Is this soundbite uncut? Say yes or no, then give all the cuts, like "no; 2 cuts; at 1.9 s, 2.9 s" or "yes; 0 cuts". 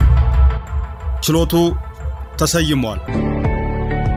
yes; 0 cuts